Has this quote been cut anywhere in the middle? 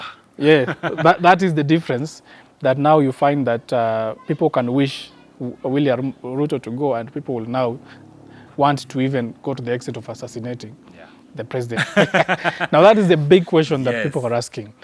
yes; 1 cut; at 11.8 s

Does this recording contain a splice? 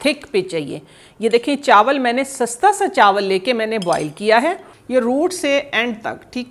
yes; 1 cut; at 4.7 s

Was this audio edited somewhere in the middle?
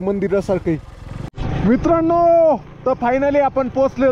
yes; 1 cut; at 1.2 s

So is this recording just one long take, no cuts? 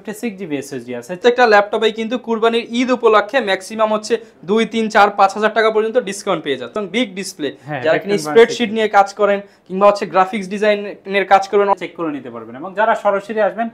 no; 3 cuts; at 1.2 s, 6.8 s, 11.7 s

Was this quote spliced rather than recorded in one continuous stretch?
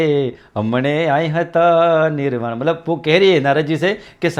no; 0 cuts

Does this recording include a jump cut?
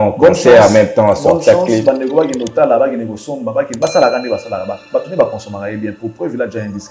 no; 0 cuts

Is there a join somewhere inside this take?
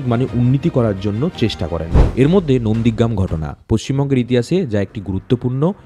yes; 1 cut; at 1.9 s

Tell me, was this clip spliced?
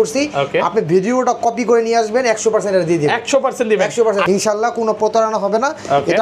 no; 0 cuts

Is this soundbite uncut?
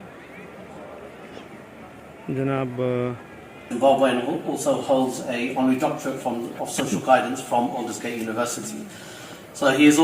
no; 1 cut; at 3.7 s

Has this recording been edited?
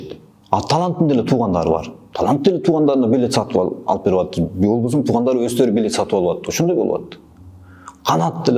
no; 0 cuts

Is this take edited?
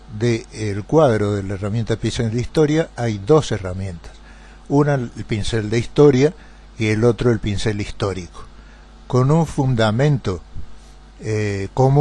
no; 0 cuts

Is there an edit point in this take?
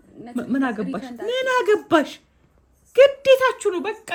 no; 0 cuts

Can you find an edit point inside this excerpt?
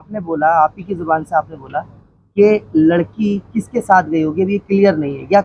no; 0 cuts

